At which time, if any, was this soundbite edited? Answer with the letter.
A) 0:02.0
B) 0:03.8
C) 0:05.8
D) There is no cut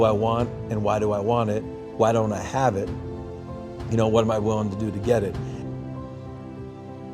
C